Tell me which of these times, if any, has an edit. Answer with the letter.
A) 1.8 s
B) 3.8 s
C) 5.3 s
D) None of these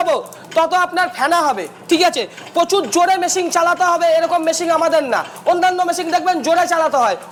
D